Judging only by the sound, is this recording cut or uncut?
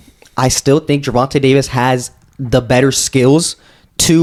uncut